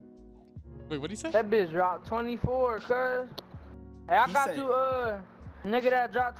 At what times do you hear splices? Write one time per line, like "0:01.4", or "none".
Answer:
none